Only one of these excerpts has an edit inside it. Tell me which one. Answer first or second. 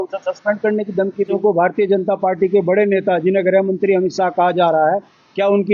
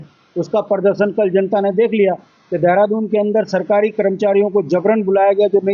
first